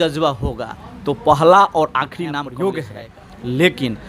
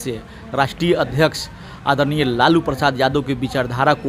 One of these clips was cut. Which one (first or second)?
first